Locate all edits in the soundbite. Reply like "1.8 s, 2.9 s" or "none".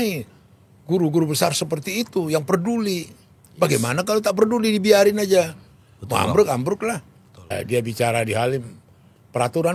7.6 s